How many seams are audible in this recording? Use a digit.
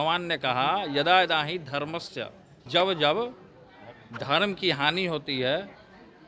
1